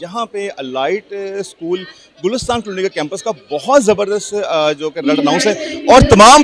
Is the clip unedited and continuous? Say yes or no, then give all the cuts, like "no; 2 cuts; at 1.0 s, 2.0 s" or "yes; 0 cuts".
yes; 0 cuts